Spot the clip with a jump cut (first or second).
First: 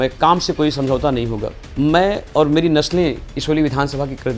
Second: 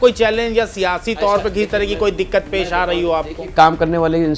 first